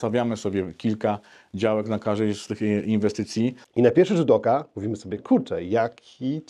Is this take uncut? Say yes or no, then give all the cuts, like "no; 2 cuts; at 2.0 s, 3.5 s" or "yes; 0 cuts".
no; 1 cut; at 3.6 s